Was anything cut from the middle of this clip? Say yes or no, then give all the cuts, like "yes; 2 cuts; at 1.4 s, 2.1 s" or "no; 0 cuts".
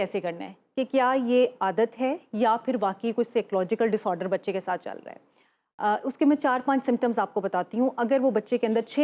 no; 0 cuts